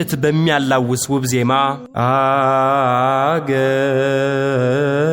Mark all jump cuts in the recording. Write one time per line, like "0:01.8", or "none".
0:01.8

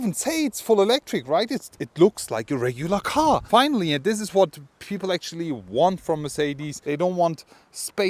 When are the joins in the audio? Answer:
none

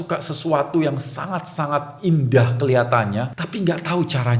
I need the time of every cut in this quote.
0:03.4

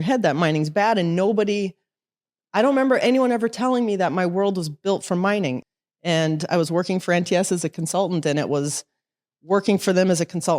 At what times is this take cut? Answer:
0:05.6

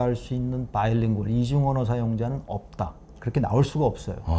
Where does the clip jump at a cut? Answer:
0:03.1

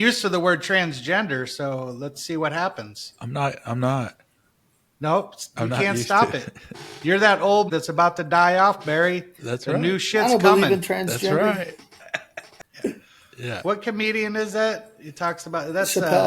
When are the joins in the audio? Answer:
0:12.6

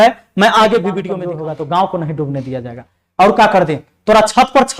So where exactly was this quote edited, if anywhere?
0:01.2

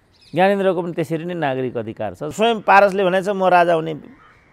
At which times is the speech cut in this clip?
0:02.3

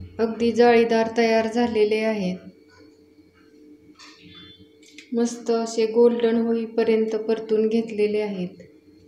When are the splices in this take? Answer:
none

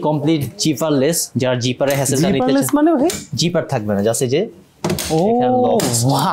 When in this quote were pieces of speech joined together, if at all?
none

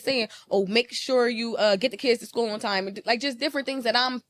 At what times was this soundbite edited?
none

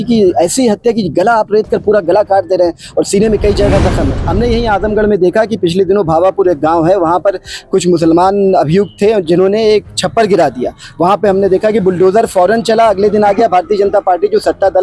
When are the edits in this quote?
0:04.2

